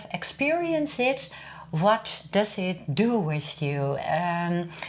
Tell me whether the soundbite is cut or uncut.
uncut